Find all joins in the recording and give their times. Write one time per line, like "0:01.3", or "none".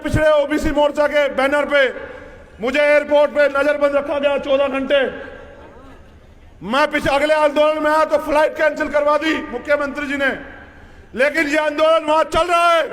none